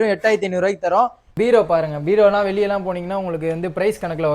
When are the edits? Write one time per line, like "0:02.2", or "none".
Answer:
0:01.2